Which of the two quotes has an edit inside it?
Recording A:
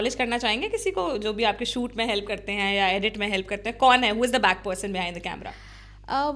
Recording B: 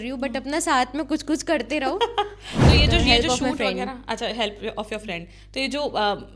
B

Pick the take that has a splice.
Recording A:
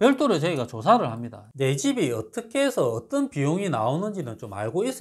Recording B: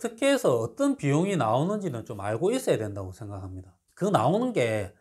A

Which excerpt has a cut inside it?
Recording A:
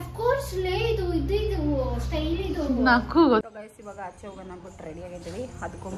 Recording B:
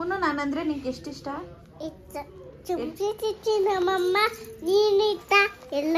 A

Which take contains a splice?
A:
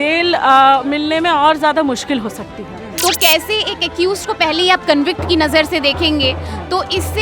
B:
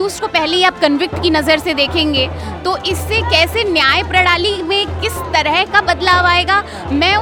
A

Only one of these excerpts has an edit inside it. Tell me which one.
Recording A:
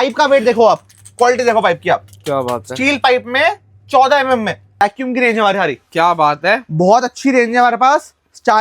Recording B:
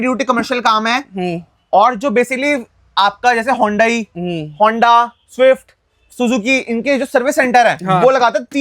A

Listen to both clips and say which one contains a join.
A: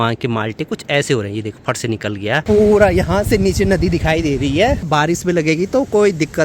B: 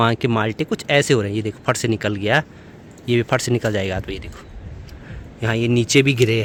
A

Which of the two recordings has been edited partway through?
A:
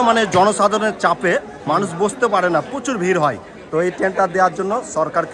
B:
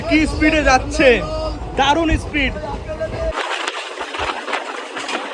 B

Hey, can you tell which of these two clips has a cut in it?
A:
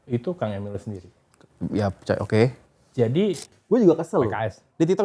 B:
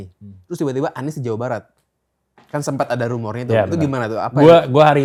A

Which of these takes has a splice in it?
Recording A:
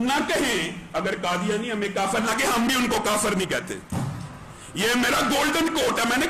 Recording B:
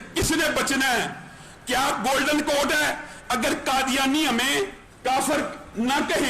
B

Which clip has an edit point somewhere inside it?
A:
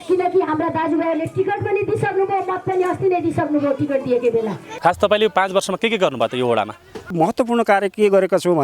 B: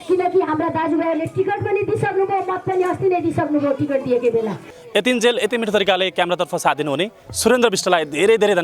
A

